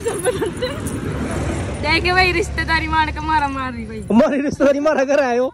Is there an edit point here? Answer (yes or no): no